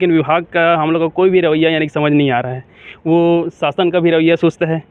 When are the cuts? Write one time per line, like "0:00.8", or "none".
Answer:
none